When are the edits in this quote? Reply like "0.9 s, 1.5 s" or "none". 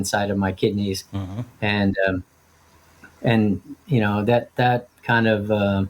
none